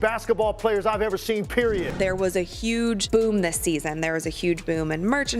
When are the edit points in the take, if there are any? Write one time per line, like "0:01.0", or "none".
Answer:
0:01.9